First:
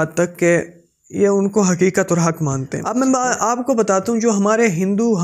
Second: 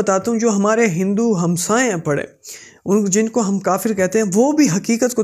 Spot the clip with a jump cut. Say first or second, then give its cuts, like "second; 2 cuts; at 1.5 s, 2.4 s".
first; 1 cut; at 2.8 s